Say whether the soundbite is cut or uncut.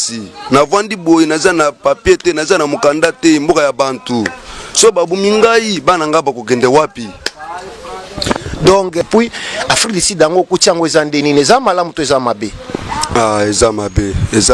cut